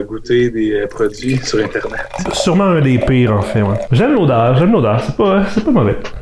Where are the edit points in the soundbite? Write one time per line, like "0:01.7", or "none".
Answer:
0:03.8